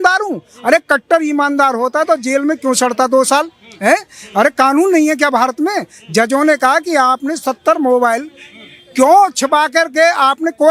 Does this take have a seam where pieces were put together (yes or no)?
no